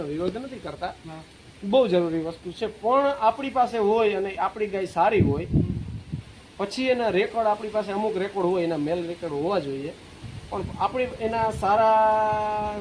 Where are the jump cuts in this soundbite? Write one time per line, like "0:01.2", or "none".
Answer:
none